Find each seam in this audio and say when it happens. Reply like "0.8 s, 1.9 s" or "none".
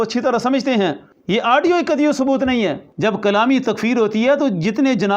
1.1 s, 2.9 s

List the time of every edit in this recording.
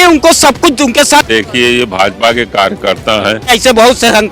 1.3 s, 3.5 s

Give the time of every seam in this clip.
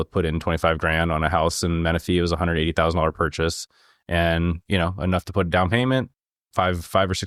none

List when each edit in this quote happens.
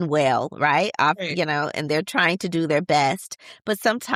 none

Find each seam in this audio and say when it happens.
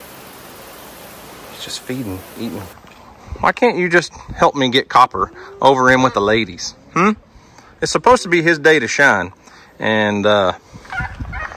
2.7 s

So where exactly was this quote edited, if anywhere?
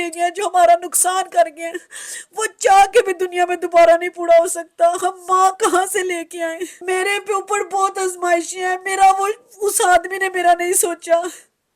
6.7 s

